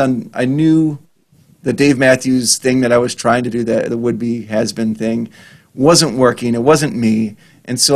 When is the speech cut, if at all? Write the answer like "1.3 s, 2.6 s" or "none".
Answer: none

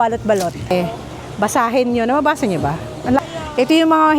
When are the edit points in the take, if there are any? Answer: 0.7 s, 3.2 s

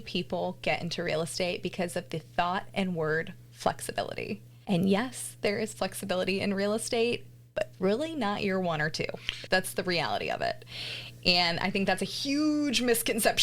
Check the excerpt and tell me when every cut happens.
4.5 s

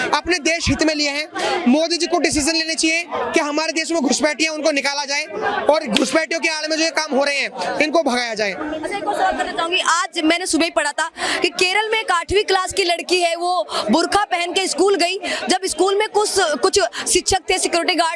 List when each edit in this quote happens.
none

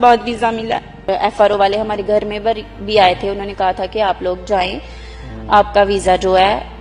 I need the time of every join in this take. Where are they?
1.0 s

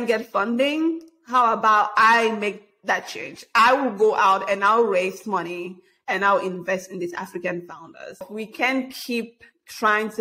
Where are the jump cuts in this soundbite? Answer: 8.3 s

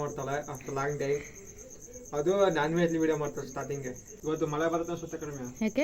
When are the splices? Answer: 4.0 s

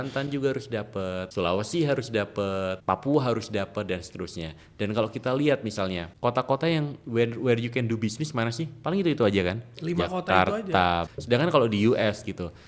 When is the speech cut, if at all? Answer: 1.3 s, 2.8 s, 6.1 s, 11.1 s

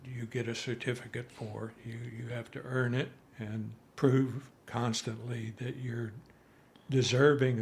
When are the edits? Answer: 3.3 s, 4.6 s

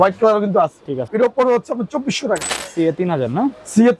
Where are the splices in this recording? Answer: 1.1 s, 2.5 s

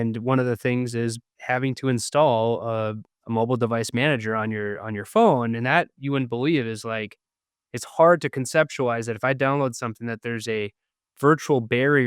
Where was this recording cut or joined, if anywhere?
1.3 s, 3.1 s

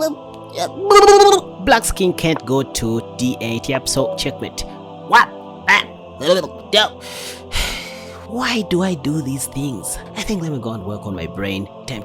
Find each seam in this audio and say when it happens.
1.5 s

